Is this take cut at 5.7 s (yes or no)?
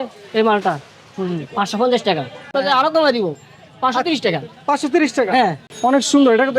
yes